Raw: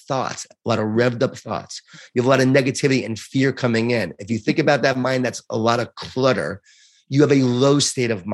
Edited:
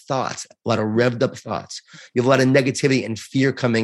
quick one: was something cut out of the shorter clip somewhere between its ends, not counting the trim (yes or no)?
no